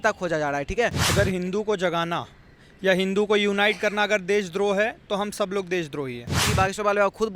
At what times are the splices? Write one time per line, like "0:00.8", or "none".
0:01.0
0:06.4